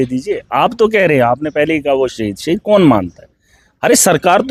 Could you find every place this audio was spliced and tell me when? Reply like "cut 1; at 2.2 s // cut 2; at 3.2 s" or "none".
none